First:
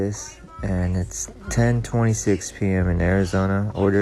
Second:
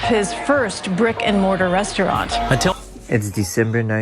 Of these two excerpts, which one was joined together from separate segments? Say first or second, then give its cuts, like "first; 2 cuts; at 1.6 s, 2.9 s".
second; 1 cut; at 2.8 s